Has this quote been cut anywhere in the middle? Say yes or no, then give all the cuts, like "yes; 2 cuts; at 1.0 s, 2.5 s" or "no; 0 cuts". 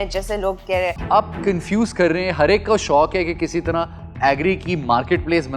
yes; 1 cut; at 1.0 s